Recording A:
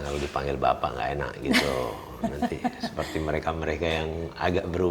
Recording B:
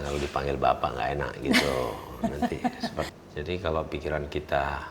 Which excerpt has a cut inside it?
B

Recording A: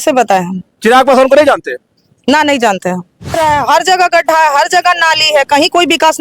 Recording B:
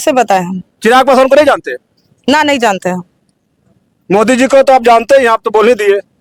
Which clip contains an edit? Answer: A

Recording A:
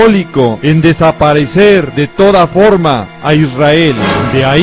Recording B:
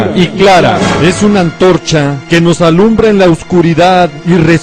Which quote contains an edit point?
A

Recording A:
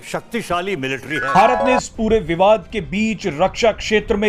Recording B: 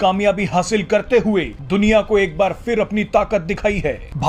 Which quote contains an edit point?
A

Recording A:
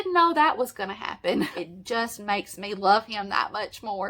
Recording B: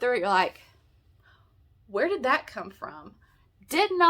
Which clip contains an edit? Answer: A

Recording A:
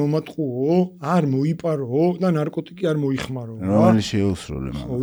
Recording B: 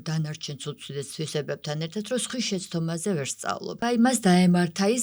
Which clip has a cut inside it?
B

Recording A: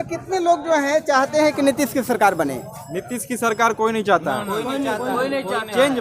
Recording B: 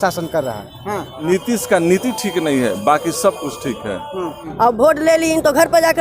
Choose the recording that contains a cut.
B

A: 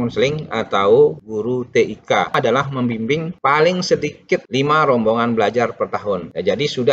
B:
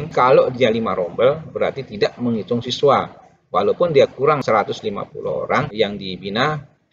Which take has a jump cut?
A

